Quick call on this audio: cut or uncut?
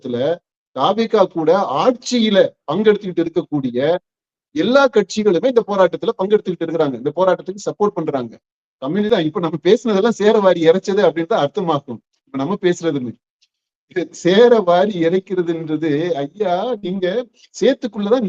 cut